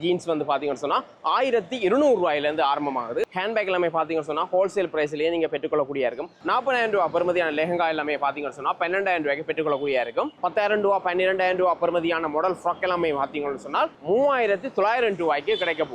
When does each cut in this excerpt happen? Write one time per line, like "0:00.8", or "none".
0:03.2
0:06.3
0:10.4